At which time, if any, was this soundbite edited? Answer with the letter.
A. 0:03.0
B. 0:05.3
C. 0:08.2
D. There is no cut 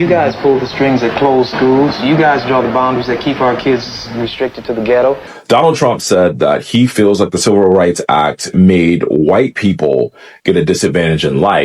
B